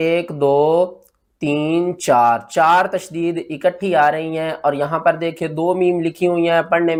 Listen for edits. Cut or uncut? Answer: uncut